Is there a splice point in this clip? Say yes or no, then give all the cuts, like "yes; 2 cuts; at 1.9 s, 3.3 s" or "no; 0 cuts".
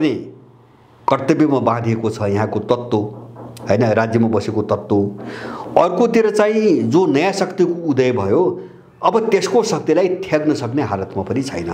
no; 0 cuts